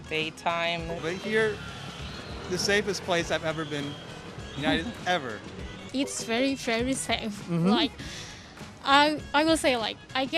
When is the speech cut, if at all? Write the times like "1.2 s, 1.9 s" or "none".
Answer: 0.9 s, 5.8 s

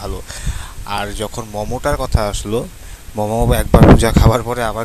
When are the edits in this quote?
none

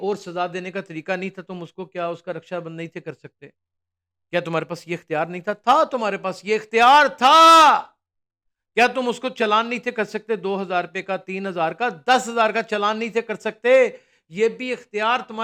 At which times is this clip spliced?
none

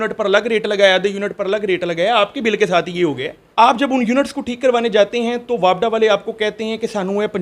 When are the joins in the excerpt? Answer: 3.3 s

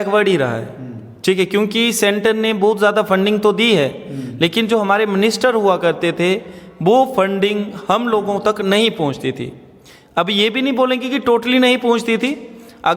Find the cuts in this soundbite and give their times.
none

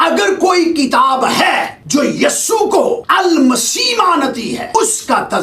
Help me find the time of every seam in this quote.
1.8 s, 3.1 s, 4.7 s

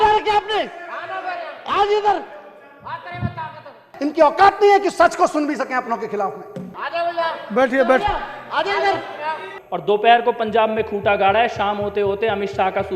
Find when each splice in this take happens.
4.0 s, 6.7 s, 9.5 s

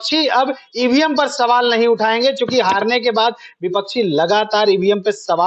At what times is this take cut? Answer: none

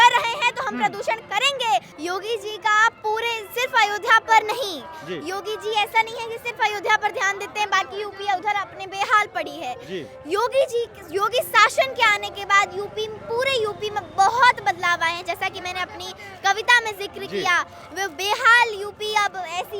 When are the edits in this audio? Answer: 1.9 s

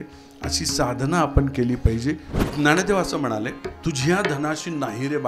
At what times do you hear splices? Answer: 2.4 s, 3.6 s

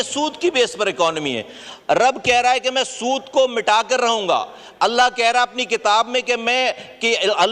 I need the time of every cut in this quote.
none

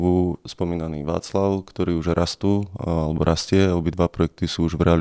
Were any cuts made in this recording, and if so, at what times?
none

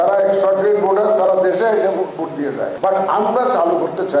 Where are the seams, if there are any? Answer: 2.7 s

